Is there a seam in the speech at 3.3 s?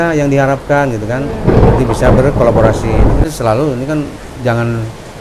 yes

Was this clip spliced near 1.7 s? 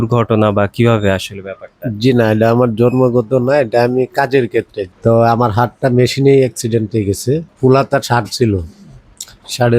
no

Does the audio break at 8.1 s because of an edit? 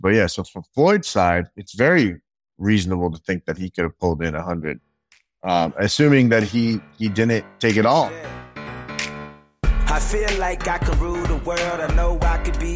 yes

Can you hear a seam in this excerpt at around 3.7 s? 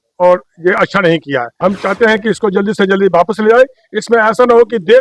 no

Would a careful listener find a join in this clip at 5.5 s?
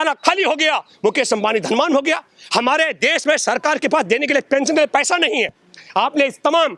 no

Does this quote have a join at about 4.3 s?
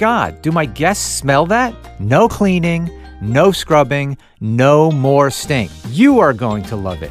no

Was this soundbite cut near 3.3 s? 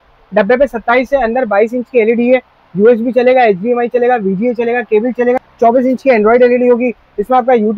no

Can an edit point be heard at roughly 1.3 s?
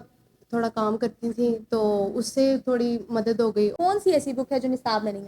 no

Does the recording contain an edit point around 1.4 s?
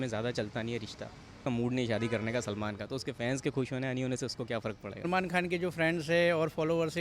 yes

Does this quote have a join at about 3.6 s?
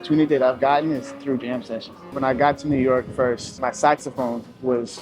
yes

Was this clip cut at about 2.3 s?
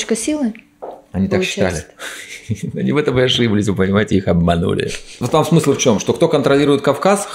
no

